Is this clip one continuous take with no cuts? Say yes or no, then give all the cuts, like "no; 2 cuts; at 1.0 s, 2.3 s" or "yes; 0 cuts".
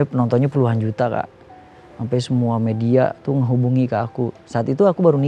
yes; 0 cuts